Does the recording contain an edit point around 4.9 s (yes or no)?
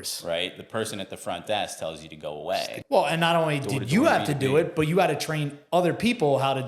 no